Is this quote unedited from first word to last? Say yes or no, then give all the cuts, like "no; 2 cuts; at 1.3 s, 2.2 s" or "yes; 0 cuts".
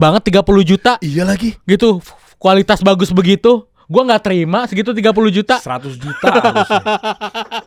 yes; 0 cuts